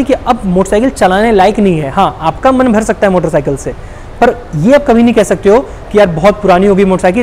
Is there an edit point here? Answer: no; 0 cuts

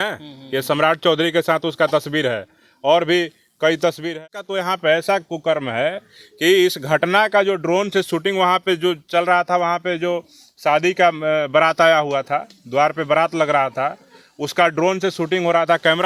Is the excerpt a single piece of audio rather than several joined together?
no; 1 cut; at 4.1 s

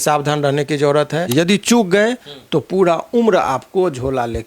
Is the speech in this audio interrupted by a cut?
yes; 1 cut; at 1.3 s

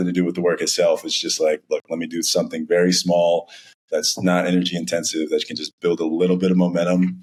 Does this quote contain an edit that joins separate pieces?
no; 0 cuts

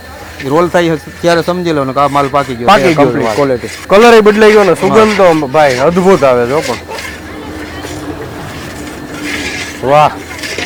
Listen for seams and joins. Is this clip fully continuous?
yes; 0 cuts

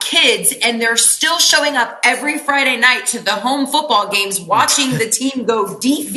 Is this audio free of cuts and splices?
yes; 0 cuts

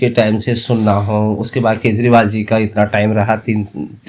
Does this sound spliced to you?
no; 0 cuts

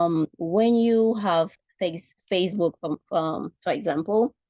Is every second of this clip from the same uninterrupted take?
yes; 0 cuts

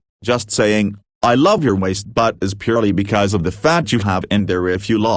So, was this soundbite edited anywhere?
no; 0 cuts

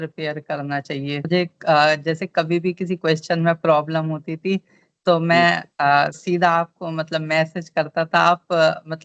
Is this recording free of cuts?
no; 1 cut; at 1.2 s

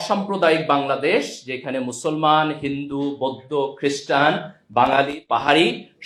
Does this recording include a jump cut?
no; 0 cuts

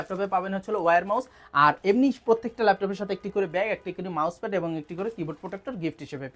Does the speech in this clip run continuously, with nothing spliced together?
yes; 0 cuts

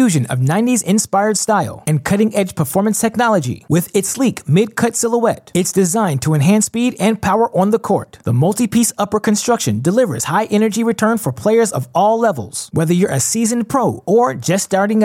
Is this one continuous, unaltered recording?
yes; 0 cuts

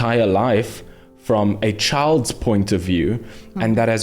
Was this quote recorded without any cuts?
yes; 0 cuts

